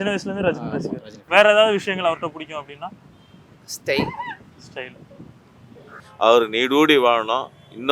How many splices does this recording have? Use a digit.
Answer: 1